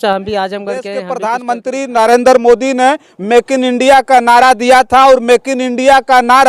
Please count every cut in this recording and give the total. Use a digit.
1